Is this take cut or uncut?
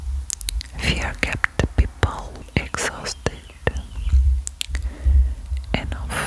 cut